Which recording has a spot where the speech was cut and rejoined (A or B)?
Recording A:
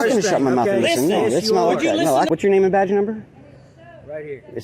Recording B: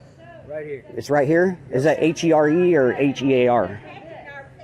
A